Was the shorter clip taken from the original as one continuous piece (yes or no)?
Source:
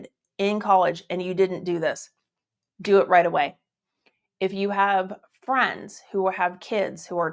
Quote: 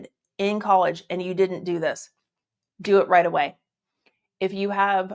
yes